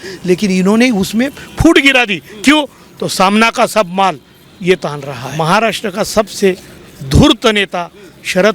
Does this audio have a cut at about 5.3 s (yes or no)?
yes